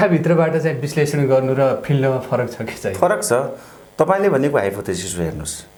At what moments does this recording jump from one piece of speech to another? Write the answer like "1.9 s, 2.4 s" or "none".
none